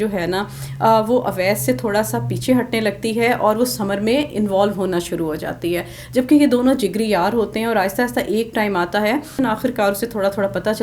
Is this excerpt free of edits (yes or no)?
no